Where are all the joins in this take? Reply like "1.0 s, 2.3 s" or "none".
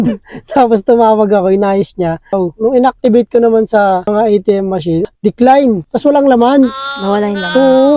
2.3 s, 4.0 s, 5.1 s, 5.9 s

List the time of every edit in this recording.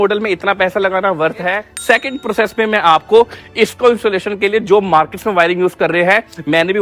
1.7 s

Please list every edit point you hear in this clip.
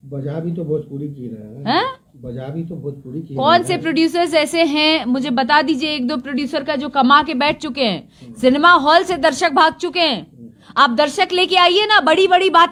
none

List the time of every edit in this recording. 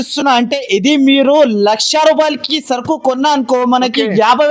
none

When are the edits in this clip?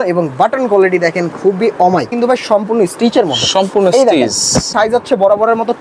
2.1 s, 4.7 s

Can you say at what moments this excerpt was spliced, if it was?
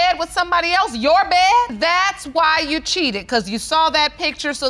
1.7 s

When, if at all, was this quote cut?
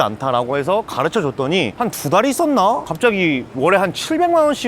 3.1 s

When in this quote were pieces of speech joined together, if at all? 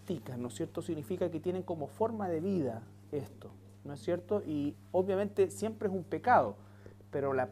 4.0 s

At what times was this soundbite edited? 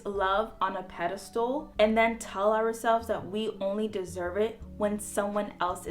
1.7 s

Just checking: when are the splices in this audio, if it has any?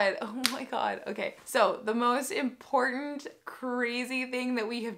1.4 s

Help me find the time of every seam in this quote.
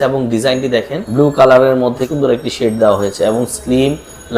1.0 s, 2.0 s

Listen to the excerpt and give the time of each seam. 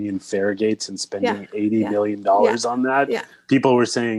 none

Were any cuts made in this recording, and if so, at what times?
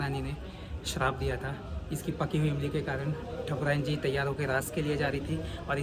none

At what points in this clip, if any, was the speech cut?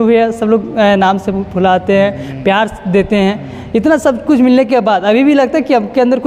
none

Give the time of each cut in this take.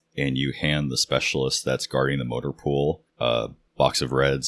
3.4 s

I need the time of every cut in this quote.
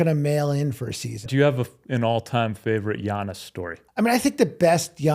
1.3 s, 3.8 s

